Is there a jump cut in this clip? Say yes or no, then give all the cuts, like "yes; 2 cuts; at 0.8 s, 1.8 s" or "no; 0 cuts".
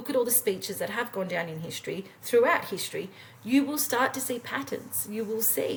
no; 0 cuts